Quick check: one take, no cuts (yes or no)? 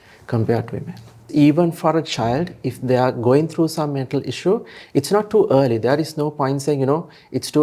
no